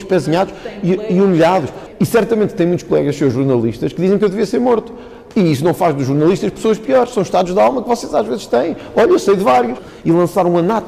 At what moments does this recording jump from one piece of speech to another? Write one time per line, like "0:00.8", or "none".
0:01.7
0:09.8